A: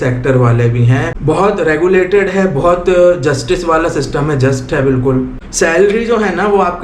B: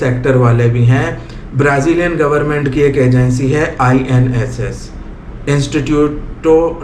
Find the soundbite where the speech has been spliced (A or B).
A